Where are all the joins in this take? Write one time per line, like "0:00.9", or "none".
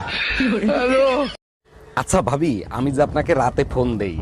0:01.4